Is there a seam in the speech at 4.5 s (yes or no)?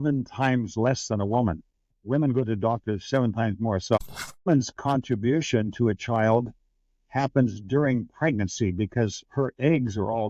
yes